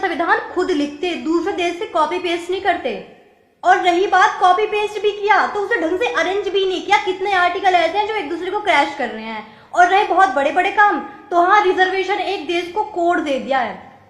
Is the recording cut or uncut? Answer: uncut